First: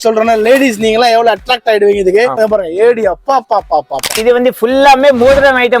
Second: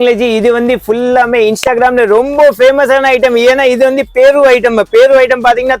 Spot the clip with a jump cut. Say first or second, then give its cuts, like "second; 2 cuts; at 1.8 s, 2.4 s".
first; 2 cuts; at 2.3 s, 4.2 s